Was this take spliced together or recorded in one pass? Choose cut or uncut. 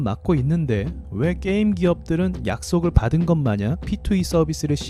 uncut